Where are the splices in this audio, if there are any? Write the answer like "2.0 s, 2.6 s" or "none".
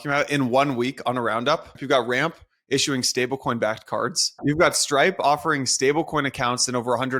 1.7 s, 4.4 s